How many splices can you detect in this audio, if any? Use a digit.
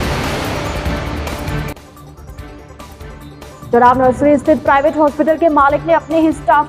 0